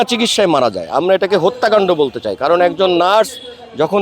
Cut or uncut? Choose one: uncut